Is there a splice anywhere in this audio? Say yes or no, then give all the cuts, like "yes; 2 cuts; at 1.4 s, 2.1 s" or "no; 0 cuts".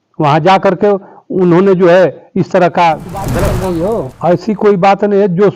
yes; 1 cut; at 3.3 s